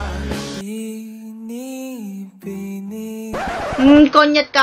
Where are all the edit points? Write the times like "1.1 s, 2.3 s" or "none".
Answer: 3.7 s